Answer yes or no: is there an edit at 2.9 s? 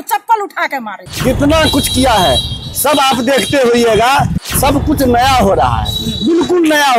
no